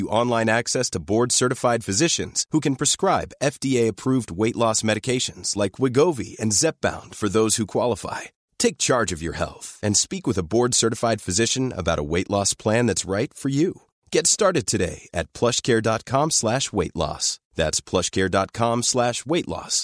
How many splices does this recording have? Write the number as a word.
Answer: zero